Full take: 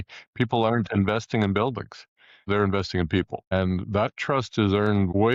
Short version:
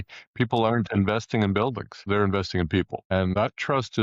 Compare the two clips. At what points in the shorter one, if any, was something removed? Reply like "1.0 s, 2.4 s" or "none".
1.9 s, 3.1 s